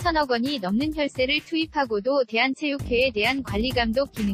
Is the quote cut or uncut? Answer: uncut